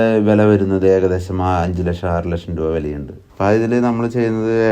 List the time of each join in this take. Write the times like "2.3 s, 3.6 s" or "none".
3.2 s